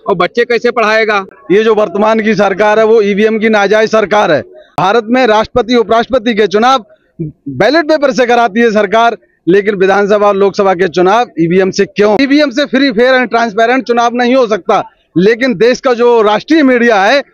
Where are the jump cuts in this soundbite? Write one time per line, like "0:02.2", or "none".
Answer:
0:01.4
0:04.6
0:12.2